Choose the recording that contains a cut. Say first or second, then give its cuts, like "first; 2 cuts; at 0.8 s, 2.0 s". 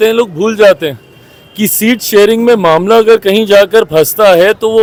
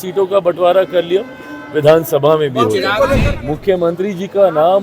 second; 1 cut; at 3.3 s